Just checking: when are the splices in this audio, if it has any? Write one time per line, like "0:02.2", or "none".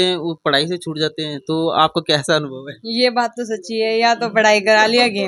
none